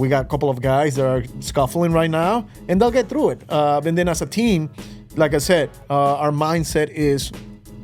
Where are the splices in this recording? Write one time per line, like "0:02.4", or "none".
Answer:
none

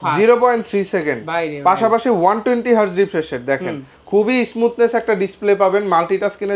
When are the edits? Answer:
none

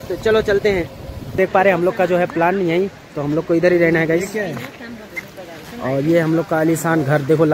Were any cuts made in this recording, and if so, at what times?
0:01.4

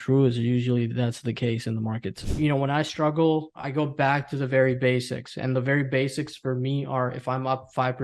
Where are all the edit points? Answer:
0:02.3

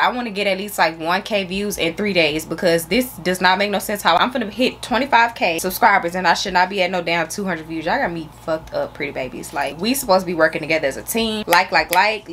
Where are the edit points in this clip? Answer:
none

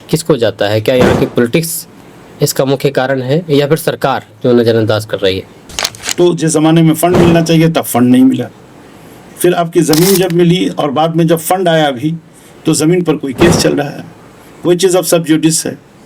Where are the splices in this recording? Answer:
0:06.0

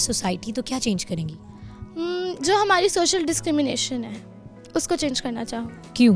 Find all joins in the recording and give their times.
none

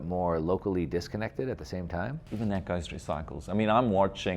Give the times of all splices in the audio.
0:02.2

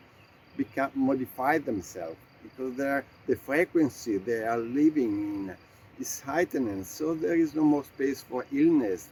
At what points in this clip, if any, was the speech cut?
none

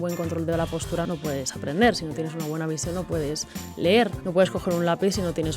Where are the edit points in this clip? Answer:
0:01.1
0:04.2

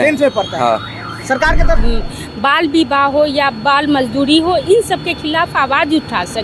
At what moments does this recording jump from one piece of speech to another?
0:01.8

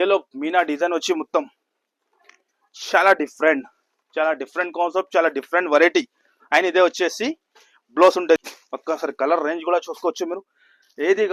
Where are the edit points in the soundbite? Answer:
0:08.4

